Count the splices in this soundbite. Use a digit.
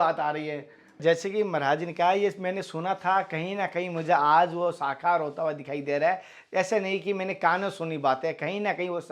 1